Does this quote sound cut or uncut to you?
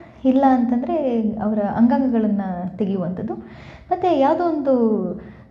uncut